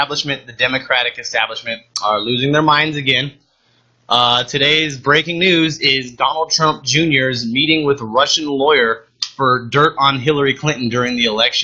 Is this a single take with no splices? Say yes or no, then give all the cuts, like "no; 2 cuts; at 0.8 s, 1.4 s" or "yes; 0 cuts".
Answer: yes; 0 cuts